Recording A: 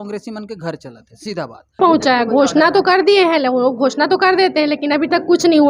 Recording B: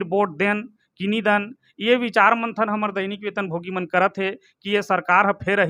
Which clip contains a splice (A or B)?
A